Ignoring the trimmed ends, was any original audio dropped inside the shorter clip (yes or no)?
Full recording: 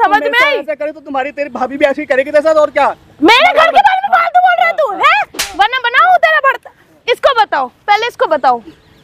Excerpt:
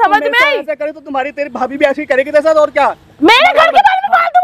no